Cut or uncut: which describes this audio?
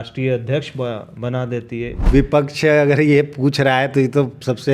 cut